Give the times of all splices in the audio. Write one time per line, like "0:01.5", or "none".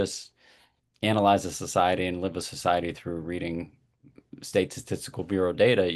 none